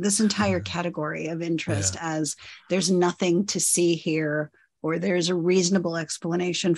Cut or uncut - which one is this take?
uncut